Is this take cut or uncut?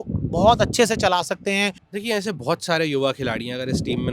cut